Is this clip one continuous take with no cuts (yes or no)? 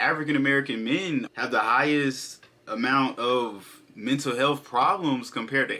no